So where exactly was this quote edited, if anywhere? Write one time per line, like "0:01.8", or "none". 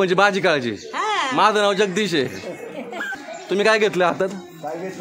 0:03.2

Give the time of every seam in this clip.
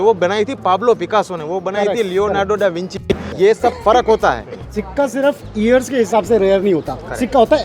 0:03.3
0:04.8

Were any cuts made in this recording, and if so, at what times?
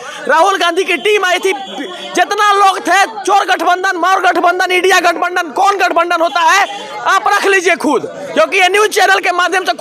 none

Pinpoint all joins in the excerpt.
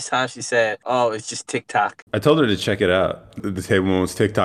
0:00.8
0:02.0
0:03.4

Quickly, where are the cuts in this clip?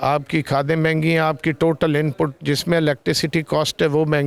none

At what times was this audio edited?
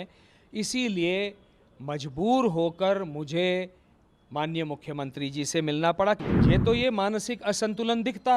0:06.2

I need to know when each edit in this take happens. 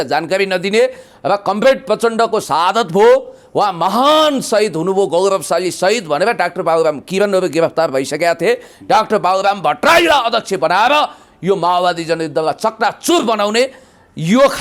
none

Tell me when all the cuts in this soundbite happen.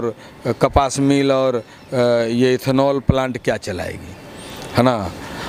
none

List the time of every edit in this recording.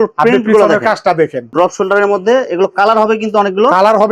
0:01.5

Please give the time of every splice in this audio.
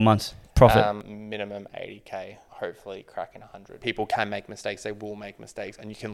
0:01.1
0:02.4
0:03.7

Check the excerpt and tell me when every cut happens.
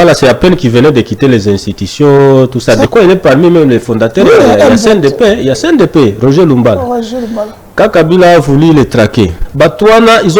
0:02.9
0:09.4

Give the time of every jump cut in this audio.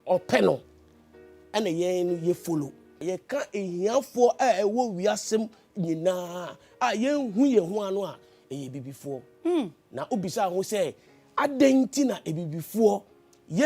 0:02.9

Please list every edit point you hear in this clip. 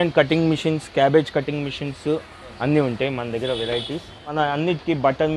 0:04.3

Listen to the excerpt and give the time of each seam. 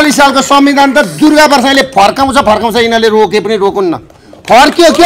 none

